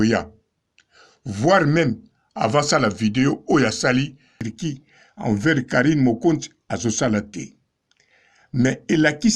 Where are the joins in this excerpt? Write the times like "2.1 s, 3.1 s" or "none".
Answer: 4.4 s